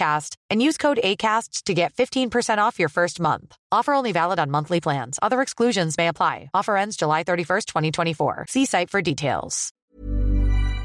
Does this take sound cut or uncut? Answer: cut